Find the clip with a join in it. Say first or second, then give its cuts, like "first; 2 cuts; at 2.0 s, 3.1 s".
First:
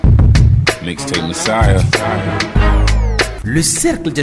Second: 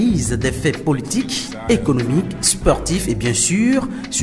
first; 1 cut; at 3.3 s